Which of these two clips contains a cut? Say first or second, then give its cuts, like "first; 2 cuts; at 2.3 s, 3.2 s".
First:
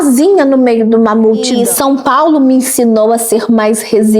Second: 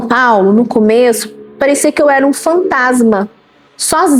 first; 1 cut; at 1.5 s